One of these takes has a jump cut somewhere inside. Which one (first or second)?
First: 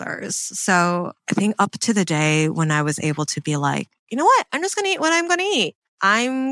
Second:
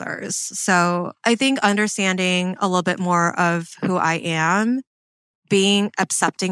first